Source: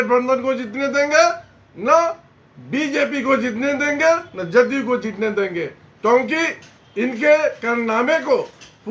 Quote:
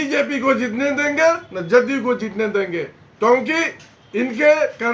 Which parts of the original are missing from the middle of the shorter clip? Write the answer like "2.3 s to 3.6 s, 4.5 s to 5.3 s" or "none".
none